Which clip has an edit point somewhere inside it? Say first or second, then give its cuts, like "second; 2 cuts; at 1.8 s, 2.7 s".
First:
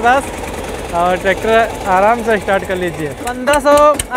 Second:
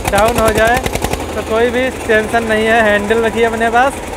first; 1 cut; at 3.3 s